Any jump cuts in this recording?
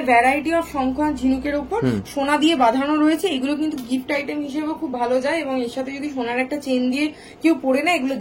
no; 0 cuts

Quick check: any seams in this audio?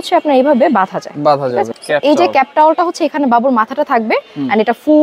yes; 1 cut; at 1.8 s

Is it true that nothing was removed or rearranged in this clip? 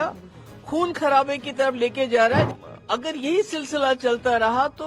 no; 1 cut; at 2.5 s

